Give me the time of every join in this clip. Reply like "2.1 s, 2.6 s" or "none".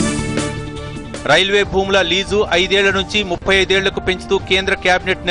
0.9 s